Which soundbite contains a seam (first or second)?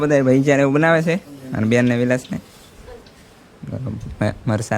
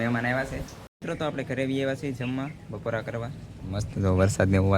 second